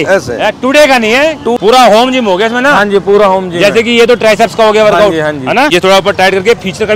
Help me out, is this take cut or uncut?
cut